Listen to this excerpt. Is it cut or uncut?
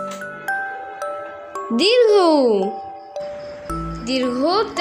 cut